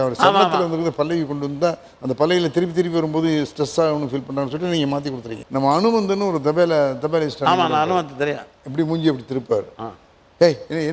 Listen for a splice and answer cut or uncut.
cut